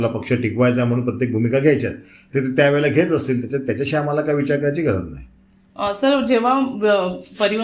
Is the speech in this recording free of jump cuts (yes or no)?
yes